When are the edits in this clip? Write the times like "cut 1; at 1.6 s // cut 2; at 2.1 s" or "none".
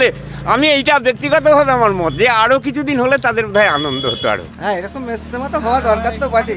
cut 1; at 4.5 s